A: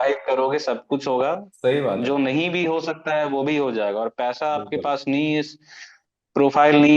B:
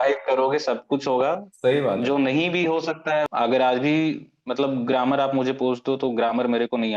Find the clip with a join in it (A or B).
B